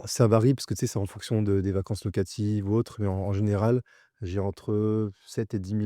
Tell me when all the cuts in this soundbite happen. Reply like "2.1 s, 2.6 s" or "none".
none